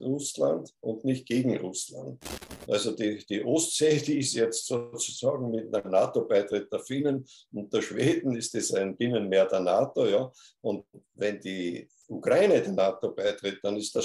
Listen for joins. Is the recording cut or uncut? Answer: cut